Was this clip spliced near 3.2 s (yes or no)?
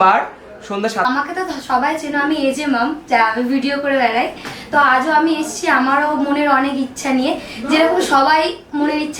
no